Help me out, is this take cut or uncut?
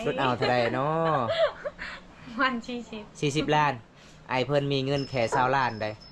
uncut